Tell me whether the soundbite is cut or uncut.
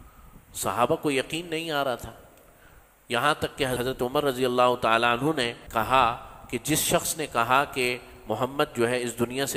cut